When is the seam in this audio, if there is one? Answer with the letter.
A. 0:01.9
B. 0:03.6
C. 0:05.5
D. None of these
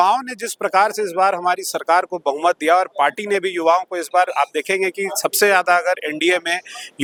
D